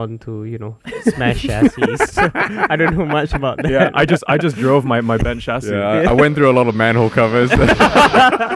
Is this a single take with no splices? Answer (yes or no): yes